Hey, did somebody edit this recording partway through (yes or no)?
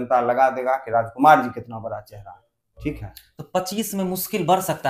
no